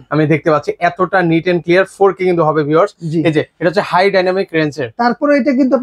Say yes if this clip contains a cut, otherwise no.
no